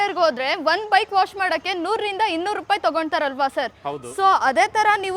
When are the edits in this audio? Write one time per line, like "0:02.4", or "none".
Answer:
none